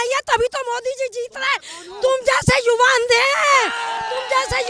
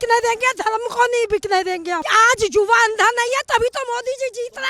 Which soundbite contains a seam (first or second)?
second